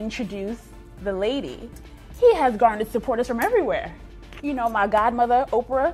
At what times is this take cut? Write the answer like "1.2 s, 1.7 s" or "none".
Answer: 3.9 s